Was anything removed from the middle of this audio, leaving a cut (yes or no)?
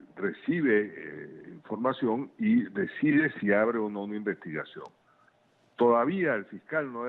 yes